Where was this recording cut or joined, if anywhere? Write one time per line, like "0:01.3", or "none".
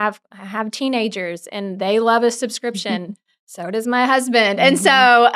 none